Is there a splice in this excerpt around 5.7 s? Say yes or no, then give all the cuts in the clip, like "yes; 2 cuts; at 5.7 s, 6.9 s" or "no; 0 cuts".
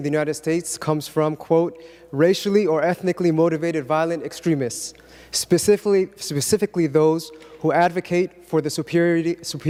no; 0 cuts